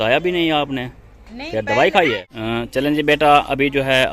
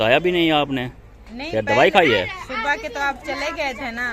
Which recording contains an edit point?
first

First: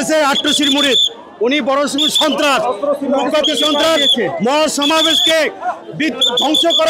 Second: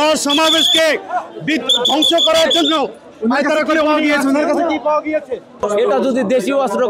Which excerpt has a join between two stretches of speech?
second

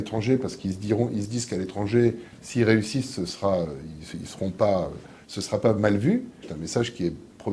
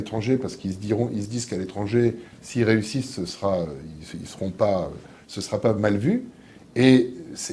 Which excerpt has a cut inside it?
first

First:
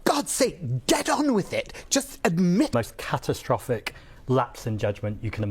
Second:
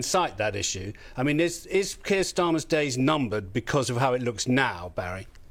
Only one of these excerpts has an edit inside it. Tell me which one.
first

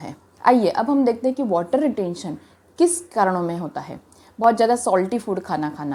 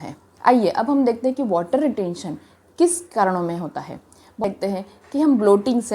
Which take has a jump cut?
second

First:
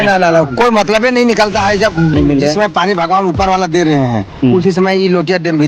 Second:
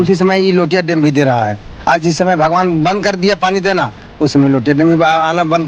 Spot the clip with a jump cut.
first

